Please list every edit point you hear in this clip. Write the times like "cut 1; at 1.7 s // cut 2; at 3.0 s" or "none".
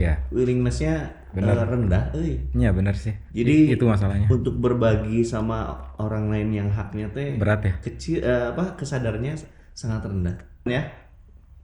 cut 1; at 10.7 s